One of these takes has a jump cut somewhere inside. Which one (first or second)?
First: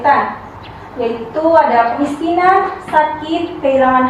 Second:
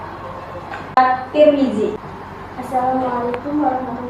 second